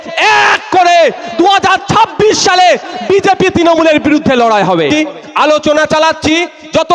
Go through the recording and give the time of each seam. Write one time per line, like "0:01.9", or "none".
0:04.9